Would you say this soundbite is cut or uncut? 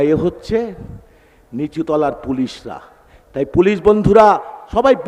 uncut